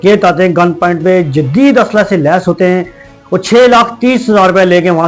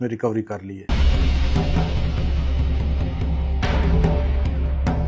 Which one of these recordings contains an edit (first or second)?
second